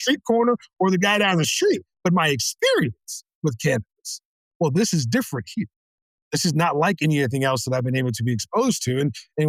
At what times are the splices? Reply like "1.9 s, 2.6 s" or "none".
none